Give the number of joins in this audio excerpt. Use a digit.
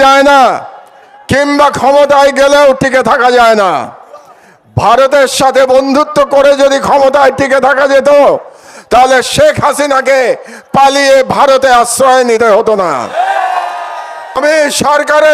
1